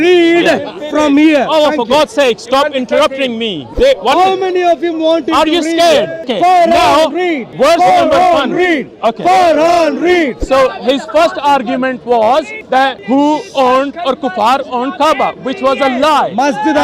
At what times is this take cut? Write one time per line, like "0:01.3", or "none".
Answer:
0:03.6
0:06.3
0:07.4
0:10.4
0:12.8